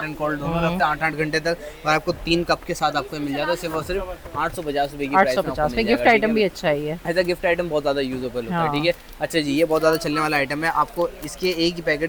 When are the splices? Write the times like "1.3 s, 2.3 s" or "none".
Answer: none